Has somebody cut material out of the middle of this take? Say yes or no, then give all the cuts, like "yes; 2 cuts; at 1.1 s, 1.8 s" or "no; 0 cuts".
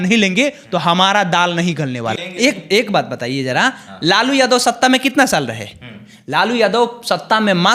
yes; 1 cut; at 2.2 s